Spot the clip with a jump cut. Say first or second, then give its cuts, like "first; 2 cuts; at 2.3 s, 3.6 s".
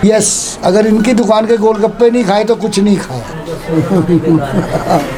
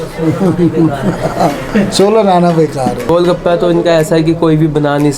second; 1 cut; at 3.1 s